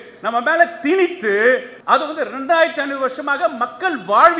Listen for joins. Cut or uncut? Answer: cut